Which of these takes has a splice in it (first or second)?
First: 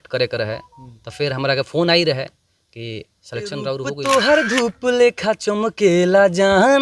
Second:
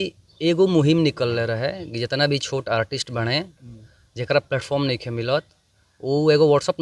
first